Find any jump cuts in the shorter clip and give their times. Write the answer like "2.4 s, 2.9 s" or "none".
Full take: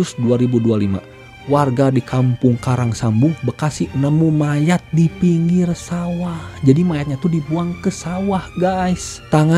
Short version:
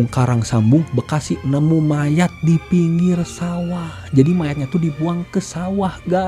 none